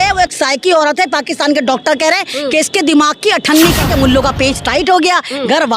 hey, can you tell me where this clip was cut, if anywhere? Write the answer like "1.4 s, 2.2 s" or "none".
3.8 s

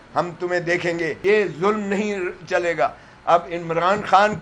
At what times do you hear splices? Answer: 1.2 s

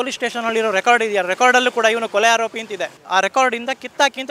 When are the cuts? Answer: 3.0 s

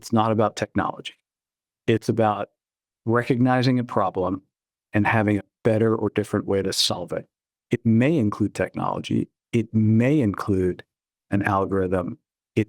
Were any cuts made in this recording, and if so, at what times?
none

